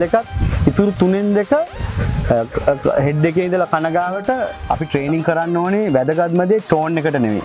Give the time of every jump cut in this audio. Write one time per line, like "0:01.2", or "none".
0:04.6